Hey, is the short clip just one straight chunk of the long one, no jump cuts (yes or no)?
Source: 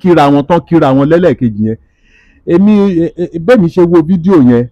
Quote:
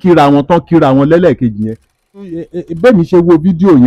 no